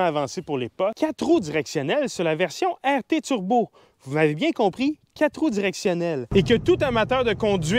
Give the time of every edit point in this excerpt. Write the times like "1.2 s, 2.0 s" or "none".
0.9 s, 6.2 s